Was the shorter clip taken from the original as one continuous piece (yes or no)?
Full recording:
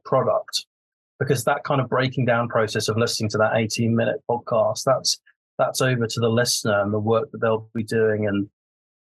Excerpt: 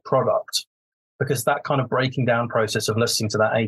yes